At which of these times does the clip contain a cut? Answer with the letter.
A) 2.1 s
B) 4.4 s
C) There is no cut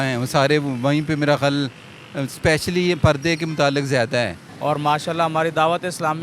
B